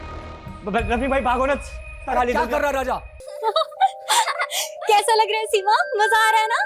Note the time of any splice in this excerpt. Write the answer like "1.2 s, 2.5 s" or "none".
3.4 s